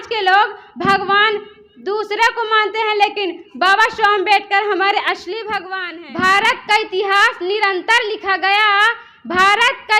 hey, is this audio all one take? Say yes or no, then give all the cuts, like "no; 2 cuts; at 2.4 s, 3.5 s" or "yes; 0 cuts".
no; 1 cut; at 5.7 s